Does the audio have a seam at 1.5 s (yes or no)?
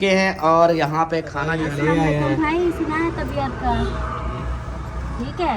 yes